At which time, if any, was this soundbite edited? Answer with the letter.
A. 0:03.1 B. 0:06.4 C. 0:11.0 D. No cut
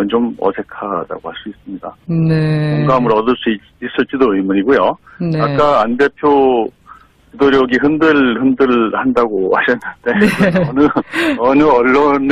B